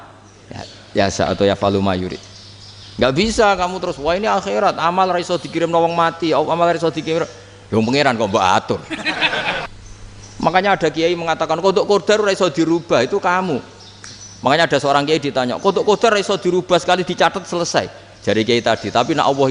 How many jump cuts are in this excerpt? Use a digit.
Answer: 1